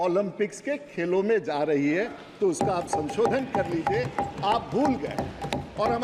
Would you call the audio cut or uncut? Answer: uncut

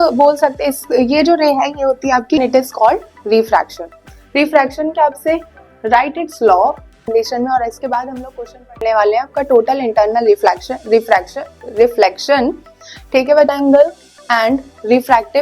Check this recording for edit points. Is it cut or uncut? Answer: cut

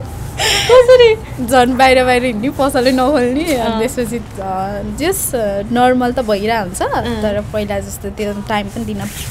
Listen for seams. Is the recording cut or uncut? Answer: uncut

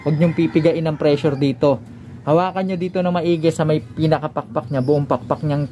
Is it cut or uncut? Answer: uncut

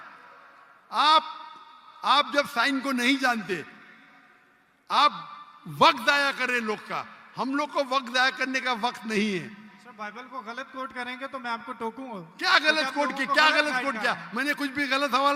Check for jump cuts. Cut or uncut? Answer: uncut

